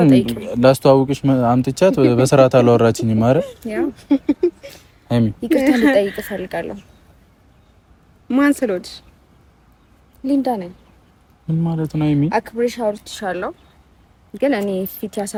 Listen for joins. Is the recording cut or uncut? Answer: uncut